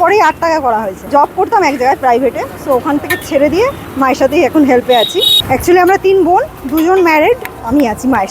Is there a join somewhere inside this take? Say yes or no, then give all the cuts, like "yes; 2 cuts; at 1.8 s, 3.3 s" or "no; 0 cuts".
yes; 3 cuts; at 1.1 s, 3.8 s, 5.4 s